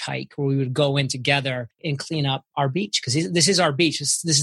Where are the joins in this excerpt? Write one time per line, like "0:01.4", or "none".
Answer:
0:02.1

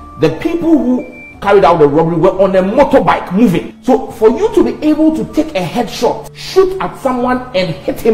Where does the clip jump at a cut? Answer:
0:03.7
0:06.3

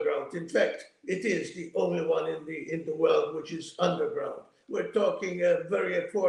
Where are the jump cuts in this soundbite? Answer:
0:04.6

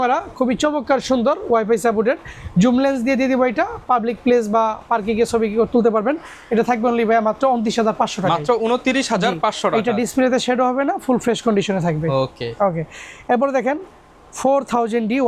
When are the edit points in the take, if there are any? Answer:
none

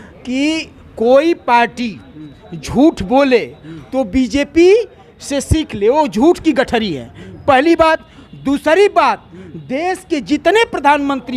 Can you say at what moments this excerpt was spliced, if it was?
none

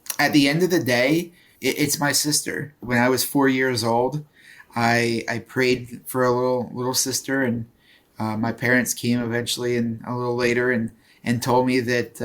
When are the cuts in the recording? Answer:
0:01.5
0:02.8

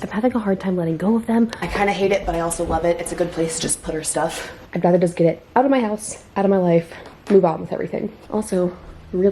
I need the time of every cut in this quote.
0:01.6
0:04.6
0:08.1

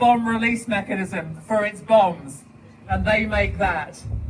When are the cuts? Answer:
none

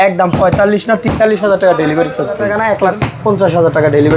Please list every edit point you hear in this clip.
0:02.4

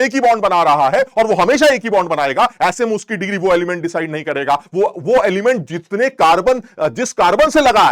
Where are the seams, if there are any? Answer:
none

